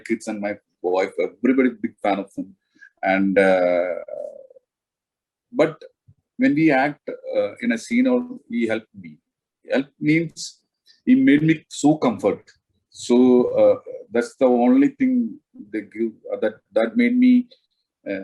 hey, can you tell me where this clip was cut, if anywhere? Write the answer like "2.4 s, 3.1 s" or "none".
none